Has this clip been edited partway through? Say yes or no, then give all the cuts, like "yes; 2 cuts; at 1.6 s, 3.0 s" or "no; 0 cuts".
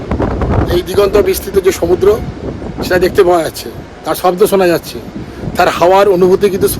no; 0 cuts